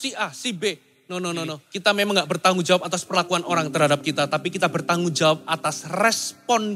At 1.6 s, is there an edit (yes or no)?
yes